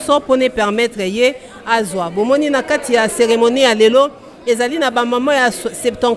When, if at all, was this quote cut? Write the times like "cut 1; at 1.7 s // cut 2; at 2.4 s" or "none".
none